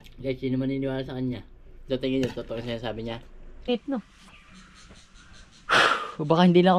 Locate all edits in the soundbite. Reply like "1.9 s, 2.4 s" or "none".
3.7 s